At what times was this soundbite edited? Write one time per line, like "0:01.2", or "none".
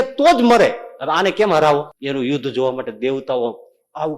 0:01.9